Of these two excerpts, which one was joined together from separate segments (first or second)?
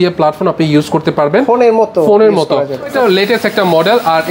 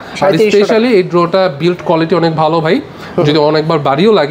first